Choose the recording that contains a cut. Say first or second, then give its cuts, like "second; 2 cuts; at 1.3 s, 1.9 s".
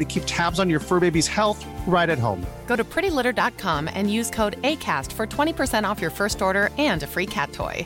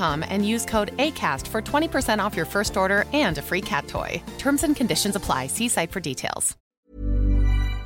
second; 1 cut; at 6.8 s